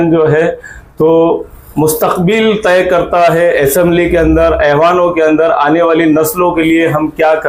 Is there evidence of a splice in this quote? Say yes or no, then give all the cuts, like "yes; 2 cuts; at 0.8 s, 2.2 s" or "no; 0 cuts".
no; 0 cuts